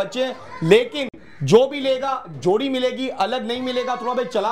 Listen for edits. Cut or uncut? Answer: uncut